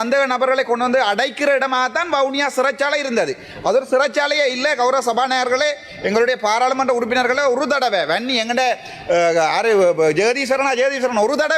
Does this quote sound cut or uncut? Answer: uncut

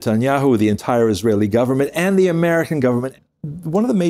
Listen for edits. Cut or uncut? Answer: cut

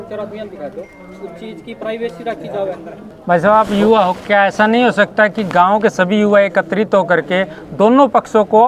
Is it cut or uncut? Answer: cut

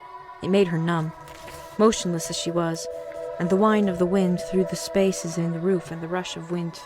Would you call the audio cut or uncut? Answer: cut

